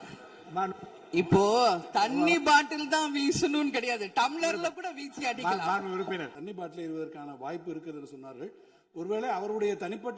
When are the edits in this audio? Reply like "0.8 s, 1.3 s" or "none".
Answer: 6.4 s

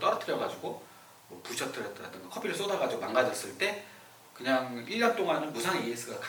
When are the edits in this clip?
none

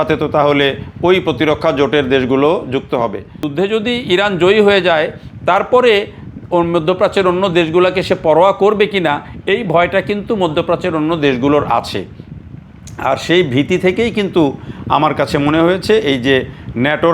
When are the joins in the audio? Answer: 3.5 s

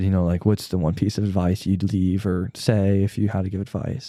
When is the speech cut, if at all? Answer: none

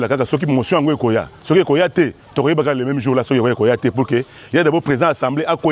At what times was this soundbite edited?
none

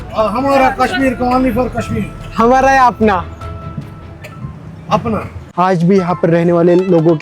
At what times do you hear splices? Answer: 5.5 s

